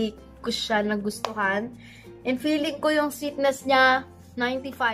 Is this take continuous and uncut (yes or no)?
yes